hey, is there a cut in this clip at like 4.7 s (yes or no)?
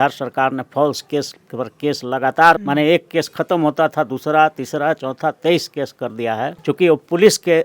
no